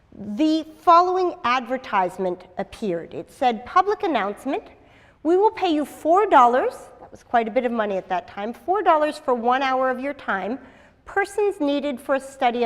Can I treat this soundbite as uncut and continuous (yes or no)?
no